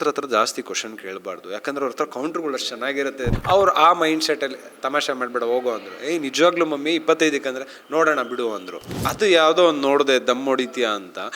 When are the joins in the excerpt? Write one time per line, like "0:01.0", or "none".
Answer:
0:03.3
0:09.0